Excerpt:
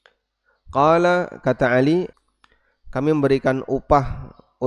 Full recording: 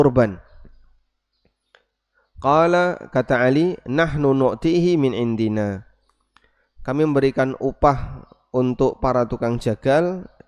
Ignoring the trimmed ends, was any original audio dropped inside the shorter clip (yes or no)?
yes